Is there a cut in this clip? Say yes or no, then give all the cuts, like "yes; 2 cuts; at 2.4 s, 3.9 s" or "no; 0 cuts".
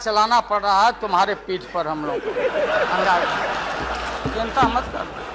no; 0 cuts